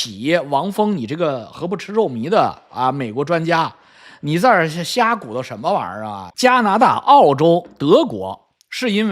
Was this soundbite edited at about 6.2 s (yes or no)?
yes